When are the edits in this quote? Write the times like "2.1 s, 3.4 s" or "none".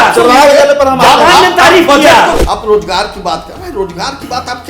2.4 s